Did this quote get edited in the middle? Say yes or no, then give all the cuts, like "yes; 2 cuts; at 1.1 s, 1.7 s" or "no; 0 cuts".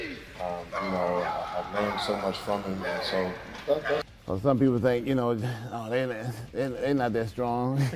yes; 1 cut; at 4.0 s